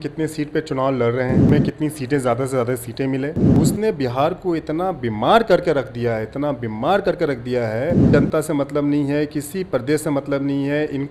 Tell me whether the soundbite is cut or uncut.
cut